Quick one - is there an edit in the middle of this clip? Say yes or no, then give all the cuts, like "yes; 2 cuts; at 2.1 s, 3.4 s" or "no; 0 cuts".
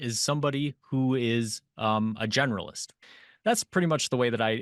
yes; 1 cut; at 3.0 s